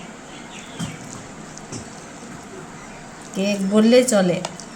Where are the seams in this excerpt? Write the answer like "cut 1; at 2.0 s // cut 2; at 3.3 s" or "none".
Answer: cut 1; at 2.9 s